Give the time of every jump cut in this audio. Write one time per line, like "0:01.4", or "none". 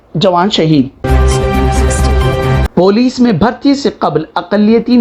0:01.0
0:02.7